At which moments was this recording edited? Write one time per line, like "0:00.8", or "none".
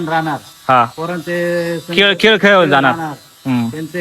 none